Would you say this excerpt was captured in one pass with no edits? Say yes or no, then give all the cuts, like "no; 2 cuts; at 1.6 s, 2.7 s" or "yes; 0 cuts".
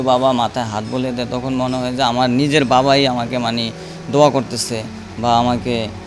yes; 0 cuts